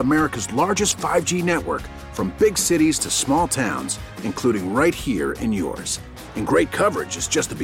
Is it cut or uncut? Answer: uncut